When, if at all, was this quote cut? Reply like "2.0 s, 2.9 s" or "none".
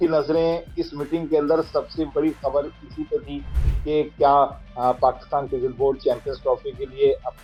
none